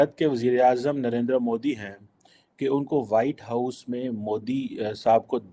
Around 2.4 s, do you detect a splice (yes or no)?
no